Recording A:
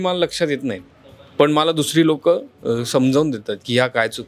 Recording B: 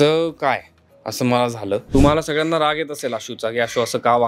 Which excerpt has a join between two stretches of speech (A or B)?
B